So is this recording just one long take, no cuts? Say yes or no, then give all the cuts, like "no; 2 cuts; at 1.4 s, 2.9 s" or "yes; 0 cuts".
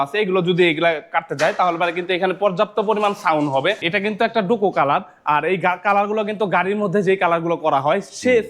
no; 1 cut; at 3.9 s